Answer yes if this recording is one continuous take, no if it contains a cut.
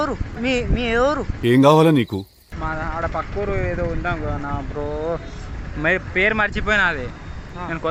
yes